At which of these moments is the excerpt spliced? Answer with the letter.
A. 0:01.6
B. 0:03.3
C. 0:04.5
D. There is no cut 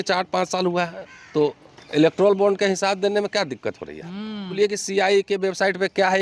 C